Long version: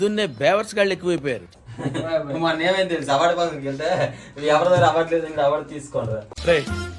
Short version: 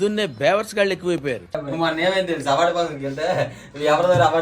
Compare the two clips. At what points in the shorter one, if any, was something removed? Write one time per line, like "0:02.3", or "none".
0:01.6